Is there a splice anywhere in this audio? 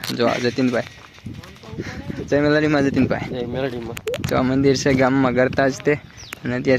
no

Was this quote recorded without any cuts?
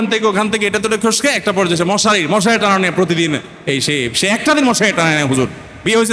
yes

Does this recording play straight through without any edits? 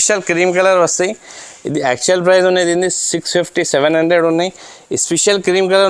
yes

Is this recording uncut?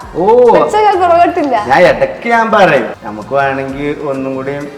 no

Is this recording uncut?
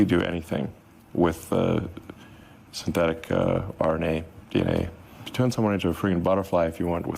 no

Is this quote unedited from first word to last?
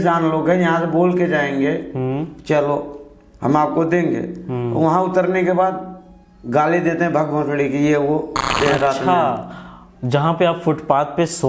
no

